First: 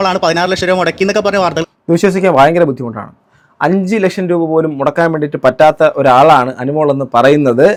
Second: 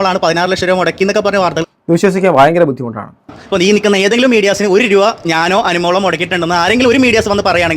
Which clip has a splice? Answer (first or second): second